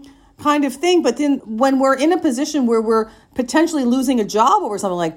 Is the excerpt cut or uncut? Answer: cut